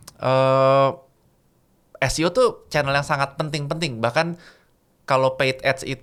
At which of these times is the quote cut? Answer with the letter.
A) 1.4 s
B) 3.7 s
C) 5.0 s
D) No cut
D